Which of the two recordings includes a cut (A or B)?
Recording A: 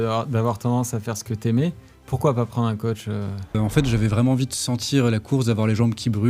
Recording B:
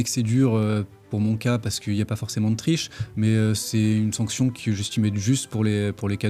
A